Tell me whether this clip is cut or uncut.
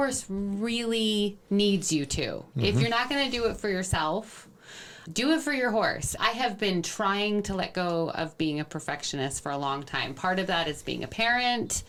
uncut